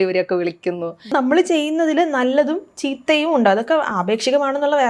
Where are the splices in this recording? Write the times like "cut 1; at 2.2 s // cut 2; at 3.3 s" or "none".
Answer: cut 1; at 1.1 s